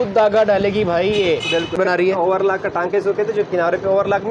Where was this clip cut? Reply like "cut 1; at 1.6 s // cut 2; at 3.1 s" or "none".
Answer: cut 1; at 1.8 s

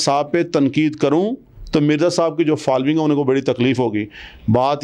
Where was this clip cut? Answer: none

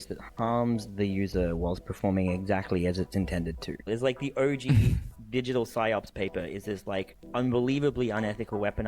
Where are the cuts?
cut 1; at 3.9 s // cut 2; at 7.2 s

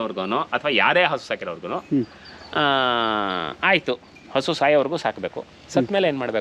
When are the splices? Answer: none

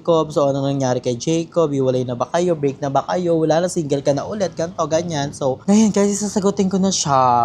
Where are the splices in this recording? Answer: none

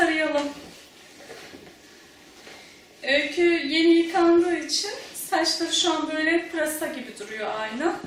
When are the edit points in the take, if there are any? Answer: cut 1; at 5.8 s

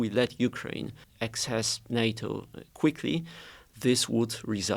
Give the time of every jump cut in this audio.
cut 1; at 1.0 s

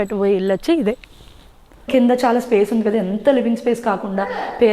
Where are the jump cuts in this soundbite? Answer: cut 1; at 1.8 s

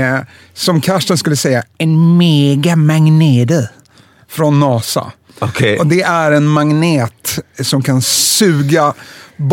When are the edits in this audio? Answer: none

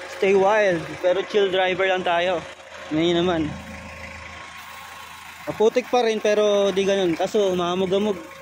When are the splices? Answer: none

